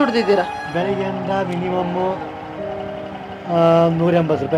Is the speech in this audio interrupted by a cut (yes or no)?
no